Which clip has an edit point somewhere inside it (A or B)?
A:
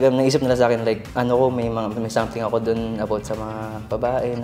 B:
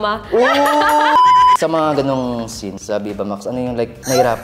B